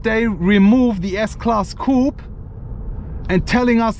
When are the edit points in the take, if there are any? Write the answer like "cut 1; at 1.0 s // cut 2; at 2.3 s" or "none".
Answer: none